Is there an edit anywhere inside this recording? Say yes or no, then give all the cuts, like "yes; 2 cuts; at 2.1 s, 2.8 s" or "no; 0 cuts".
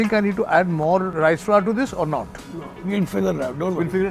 yes; 1 cut; at 1.1 s